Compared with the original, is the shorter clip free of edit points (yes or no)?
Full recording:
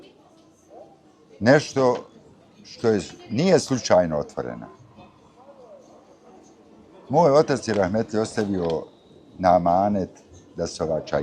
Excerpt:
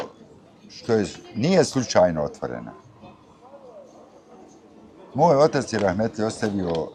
yes